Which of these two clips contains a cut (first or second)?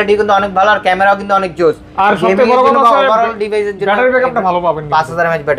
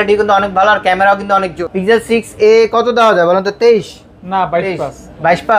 second